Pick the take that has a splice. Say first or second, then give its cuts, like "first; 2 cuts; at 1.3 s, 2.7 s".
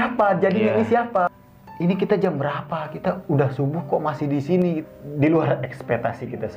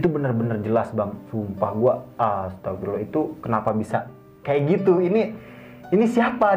first; 2 cuts; at 1.3 s, 4.8 s